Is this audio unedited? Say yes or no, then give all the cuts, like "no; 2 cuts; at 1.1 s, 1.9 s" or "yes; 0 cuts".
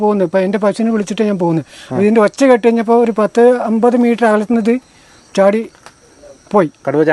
yes; 0 cuts